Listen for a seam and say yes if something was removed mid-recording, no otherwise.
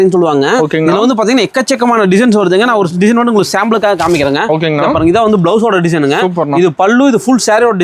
no